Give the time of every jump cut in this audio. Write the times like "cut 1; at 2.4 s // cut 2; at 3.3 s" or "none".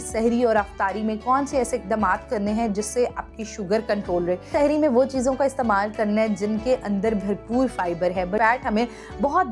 cut 1; at 4.5 s // cut 2; at 8.4 s